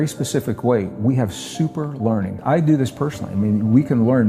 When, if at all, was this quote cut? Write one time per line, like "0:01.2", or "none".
0:02.4